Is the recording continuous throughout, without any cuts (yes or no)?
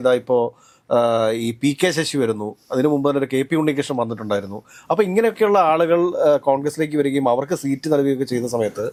yes